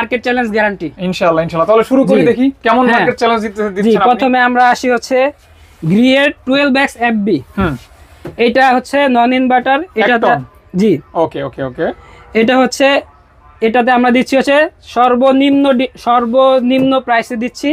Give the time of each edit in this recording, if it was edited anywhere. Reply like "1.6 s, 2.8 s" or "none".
none